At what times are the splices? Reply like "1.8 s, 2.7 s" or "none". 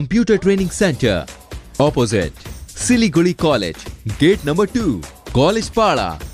none